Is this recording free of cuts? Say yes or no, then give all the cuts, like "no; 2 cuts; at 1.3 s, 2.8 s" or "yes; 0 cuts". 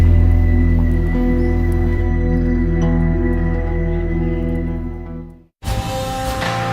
yes; 0 cuts